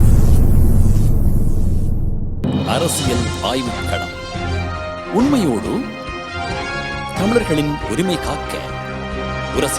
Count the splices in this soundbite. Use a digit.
1